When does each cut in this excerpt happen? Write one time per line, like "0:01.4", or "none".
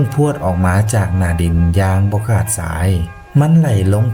none